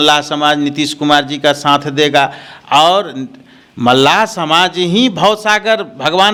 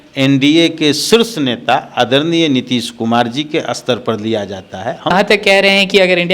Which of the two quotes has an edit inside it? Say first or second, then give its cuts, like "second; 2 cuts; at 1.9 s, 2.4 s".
second; 1 cut; at 5.1 s